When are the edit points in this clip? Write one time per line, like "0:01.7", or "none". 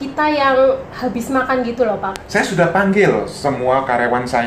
0:02.1